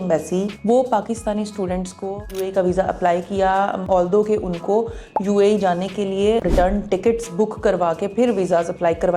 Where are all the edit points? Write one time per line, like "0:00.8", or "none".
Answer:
0:02.2